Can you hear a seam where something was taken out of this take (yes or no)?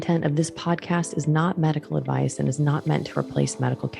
no